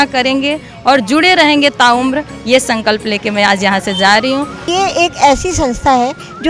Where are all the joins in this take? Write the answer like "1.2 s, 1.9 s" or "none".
4.7 s